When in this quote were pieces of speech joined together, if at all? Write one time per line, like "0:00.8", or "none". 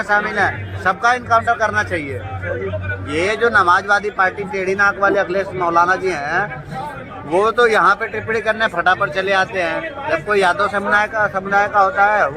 none